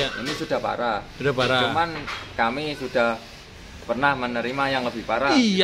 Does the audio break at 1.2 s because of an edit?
no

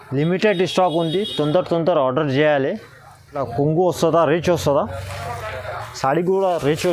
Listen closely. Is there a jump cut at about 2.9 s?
yes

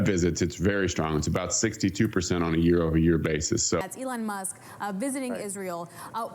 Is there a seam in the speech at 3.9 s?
yes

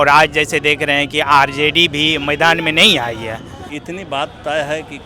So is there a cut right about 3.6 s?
yes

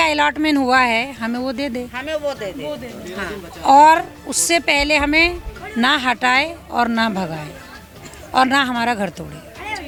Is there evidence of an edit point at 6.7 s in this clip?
no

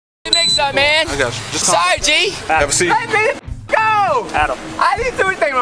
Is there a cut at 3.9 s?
no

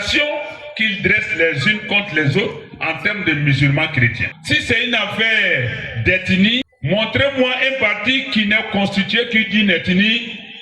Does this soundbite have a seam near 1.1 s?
no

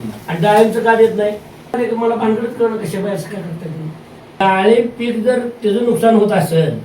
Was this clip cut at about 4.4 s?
yes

